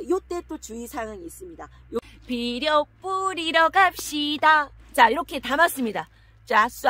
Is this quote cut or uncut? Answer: cut